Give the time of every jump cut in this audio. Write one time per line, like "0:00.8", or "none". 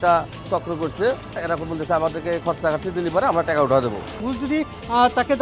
0:01.4
0:04.1